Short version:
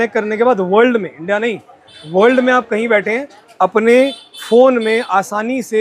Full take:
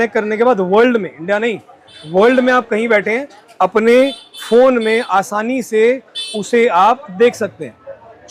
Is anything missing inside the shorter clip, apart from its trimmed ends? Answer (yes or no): no